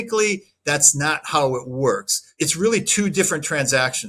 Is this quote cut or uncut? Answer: cut